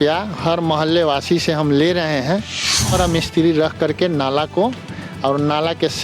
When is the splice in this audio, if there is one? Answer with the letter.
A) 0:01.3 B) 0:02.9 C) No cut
B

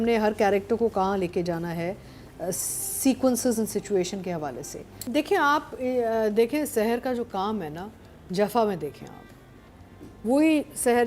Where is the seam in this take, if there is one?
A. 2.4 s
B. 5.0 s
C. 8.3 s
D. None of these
B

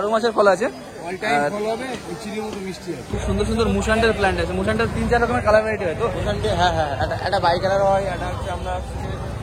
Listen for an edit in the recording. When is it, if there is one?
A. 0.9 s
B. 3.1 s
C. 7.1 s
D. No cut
B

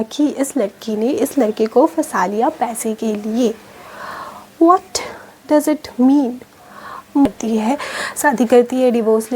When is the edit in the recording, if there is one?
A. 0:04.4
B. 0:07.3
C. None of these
B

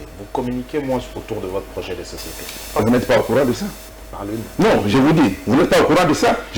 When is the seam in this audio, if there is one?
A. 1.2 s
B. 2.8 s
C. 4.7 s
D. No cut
B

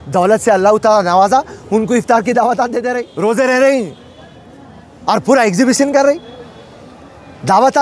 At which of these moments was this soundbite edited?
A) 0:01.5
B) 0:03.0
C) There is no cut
B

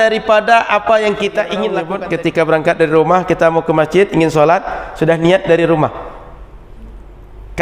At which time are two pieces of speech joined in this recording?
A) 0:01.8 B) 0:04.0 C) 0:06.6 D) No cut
A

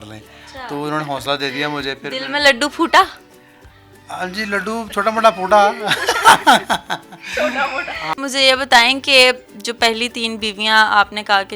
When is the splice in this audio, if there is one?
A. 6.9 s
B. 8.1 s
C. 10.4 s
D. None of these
B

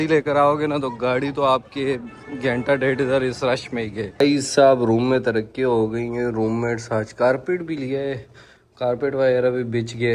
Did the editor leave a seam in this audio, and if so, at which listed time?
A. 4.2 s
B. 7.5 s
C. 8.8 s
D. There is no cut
A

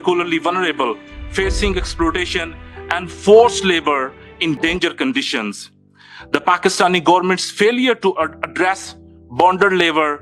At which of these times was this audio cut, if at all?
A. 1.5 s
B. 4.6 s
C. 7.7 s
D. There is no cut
B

